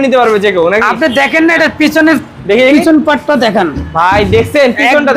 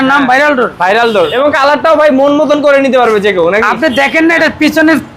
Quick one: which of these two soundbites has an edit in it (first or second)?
second